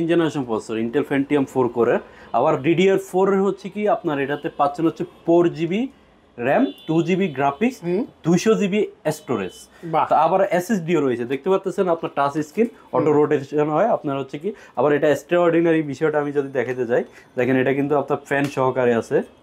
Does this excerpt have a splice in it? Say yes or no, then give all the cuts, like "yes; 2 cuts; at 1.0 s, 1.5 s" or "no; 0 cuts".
no; 0 cuts